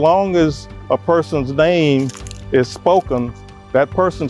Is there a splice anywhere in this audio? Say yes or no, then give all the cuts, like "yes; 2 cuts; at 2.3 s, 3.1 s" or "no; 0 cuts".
no; 0 cuts